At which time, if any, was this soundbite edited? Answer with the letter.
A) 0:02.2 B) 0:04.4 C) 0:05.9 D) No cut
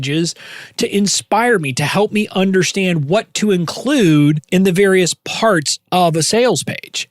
B